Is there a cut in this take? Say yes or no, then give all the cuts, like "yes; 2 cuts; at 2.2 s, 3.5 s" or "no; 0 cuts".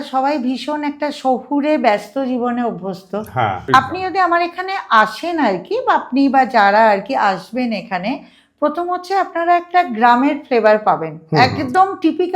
yes; 1 cut; at 3.6 s